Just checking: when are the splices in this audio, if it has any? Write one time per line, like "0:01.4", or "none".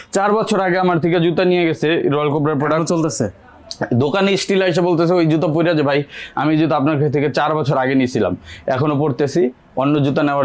none